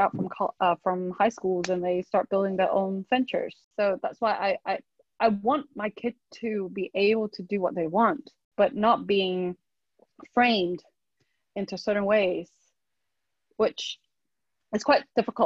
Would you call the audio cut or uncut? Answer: cut